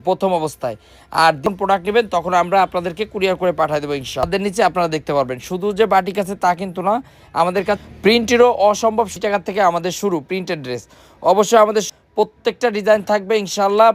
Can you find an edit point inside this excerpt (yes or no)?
yes